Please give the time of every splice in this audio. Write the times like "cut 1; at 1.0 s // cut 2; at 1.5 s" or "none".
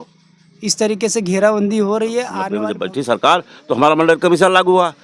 cut 1; at 2.4 s